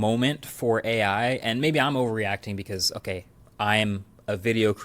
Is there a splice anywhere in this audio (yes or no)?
yes